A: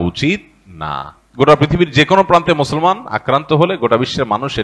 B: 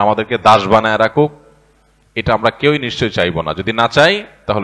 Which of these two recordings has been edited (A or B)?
A